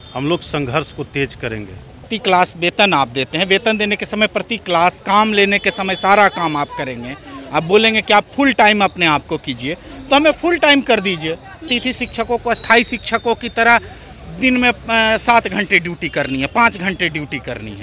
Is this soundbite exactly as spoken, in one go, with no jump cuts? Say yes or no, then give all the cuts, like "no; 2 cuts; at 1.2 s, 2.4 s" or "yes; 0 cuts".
no; 2 cuts; at 2.1 s, 11.7 s